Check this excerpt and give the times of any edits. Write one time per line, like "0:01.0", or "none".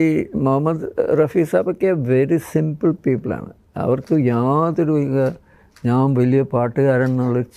none

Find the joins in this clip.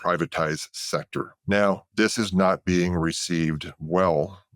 0:01.3
0:01.9

